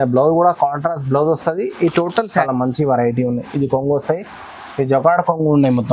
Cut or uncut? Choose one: cut